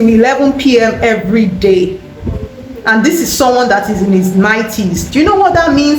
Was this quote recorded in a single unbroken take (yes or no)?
yes